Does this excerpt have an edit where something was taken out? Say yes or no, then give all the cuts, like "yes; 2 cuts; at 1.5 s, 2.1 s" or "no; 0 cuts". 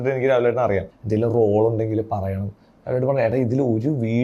yes; 1 cut; at 0.9 s